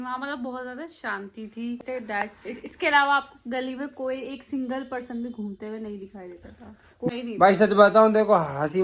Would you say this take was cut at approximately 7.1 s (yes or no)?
yes